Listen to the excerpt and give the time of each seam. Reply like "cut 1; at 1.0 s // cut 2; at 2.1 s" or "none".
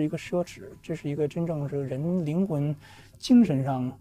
none